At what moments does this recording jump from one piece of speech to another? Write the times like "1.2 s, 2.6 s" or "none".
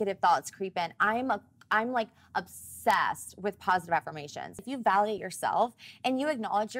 4.7 s